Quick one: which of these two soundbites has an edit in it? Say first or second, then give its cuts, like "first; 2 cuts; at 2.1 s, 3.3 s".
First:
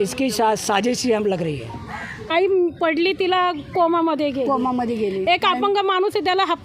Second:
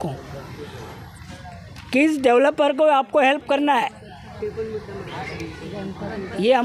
first; 1 cut; at 2.3 s